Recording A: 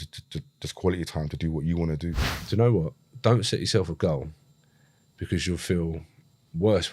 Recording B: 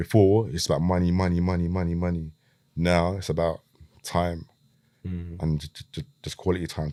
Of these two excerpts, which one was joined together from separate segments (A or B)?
A